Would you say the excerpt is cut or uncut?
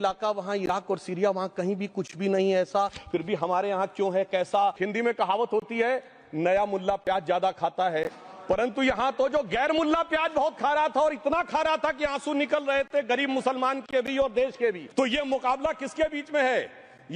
cut